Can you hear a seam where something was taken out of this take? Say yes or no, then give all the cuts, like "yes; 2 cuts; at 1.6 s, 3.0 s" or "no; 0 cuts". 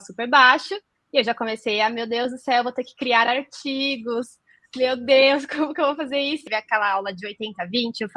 yes; 1 cut; at 6.5 s